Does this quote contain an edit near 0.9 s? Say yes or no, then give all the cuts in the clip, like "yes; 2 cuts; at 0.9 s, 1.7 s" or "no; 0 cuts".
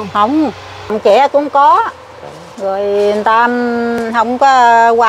yes; 1 cut; at 0.9 s